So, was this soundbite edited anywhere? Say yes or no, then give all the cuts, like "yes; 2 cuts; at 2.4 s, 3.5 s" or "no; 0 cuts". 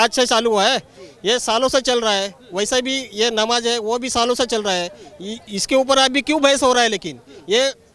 no; 0 cuts